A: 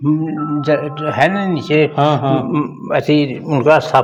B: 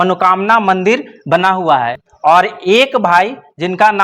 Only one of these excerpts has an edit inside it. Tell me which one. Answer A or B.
B